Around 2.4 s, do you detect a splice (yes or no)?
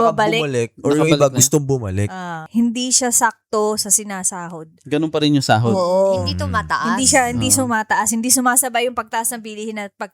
yes